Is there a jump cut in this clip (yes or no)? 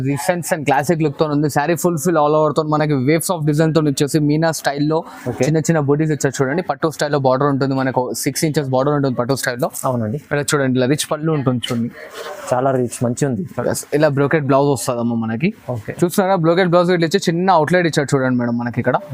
no